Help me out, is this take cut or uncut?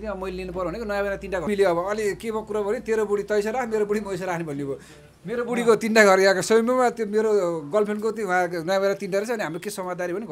cut